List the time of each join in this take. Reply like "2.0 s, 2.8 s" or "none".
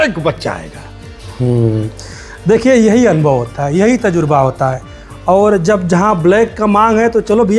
none